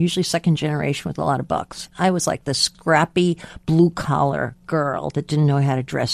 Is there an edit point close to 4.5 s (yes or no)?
no